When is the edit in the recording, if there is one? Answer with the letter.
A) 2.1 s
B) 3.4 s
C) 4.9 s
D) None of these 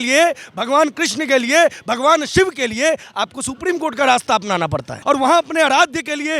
C